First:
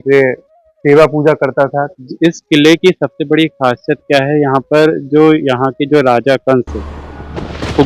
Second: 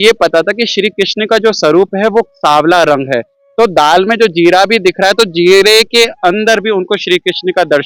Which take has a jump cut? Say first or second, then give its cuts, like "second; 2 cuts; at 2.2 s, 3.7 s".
first; 1 cut; at 1.9 s